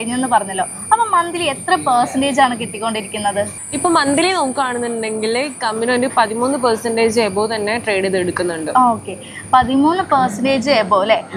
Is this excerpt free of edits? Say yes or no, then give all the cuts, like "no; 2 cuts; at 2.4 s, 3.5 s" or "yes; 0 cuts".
yes; 0 cuts